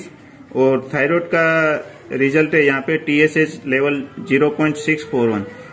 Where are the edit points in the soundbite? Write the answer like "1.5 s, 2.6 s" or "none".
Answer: none

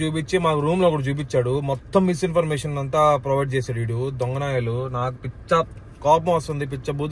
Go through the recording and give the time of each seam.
none

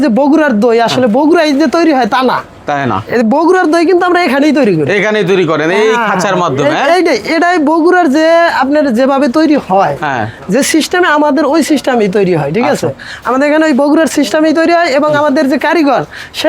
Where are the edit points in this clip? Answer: none

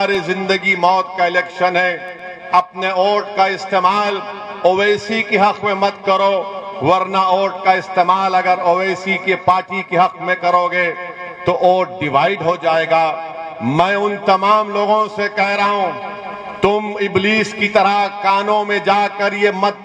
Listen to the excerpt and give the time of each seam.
none

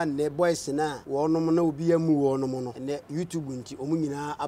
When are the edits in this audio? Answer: 1.0 s, 2.8 s

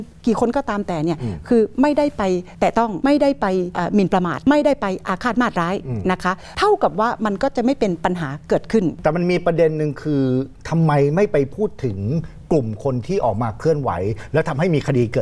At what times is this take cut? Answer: 2.8 s, 4.0 s, 6.5 s, 9.0 s

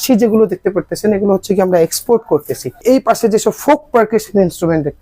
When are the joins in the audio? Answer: 2.8 s

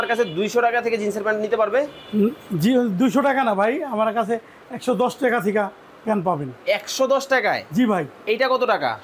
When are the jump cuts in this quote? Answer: none

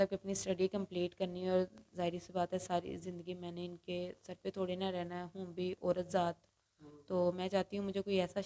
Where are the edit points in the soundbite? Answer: none

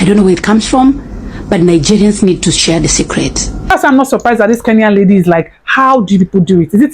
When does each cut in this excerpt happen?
3.7 s

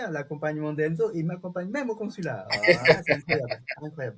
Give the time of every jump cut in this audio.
none

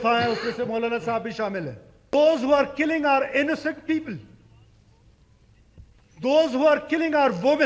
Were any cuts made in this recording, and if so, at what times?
2.1 s

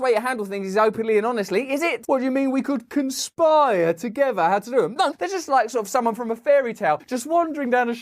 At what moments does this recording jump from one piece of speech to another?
2.0 s, 5.1 s

